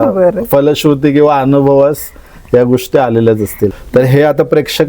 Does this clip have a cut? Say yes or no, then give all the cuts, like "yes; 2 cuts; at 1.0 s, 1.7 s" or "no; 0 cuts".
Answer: yes; 1 cut; at 3.8 s